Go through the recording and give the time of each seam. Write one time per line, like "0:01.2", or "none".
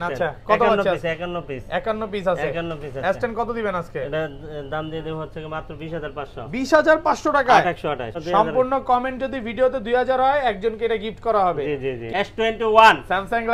0:08.1
0:12.0